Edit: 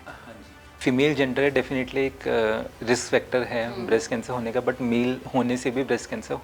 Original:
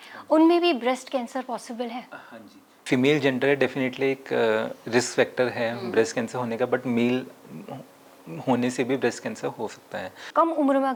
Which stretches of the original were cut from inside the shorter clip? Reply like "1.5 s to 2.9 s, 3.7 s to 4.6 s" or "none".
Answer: 7.3 s to 8.4 s